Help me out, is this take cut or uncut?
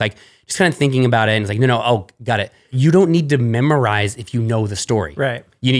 cut